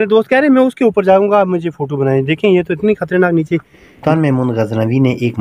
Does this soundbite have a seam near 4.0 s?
yes; 1 cut; at 4.0 s

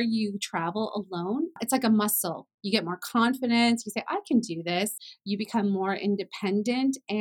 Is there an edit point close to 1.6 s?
yes; 2 cuts; at 1.6 s, 5.1 s

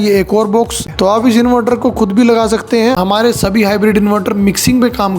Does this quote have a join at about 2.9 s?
yes; 2 cuts; at 0.9 s, 2.9 s

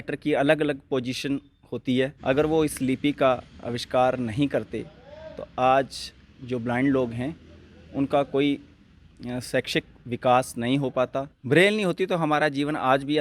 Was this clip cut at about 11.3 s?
yes; 2 cuts; at 2.2 s, 11.3 s

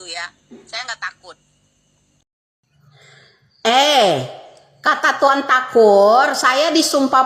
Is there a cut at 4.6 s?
no; 1 cut; at 2.7 s

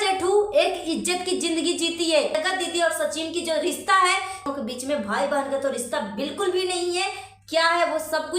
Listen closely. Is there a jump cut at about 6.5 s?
no; 2 cuts; at 2.3 s, 4.5 s

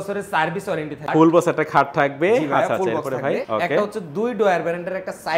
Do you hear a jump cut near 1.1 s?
yes; 2 cuts; at 1.1 s, 3.5 s

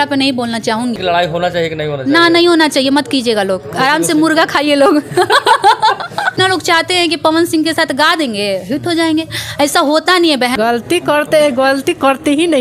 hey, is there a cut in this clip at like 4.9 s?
no; 3 cuts; at 1.0 s, 6.4 s, 10.5 s

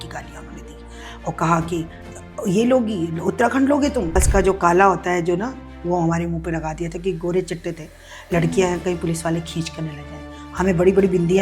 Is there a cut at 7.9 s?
no; 1 cut; at 4.1 s

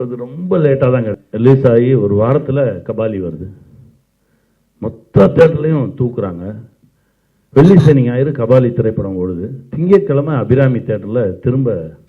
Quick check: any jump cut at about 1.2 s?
yes; 1 cut; at 1.2 s

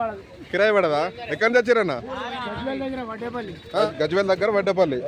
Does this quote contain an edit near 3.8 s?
yes; 1 cut; at 3.8 s

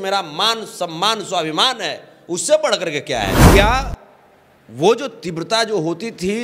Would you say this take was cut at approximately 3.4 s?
yes; 1 cut; at 3.4 s

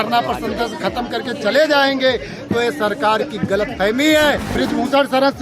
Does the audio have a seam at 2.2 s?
no; 1 cut; at 4.5 s

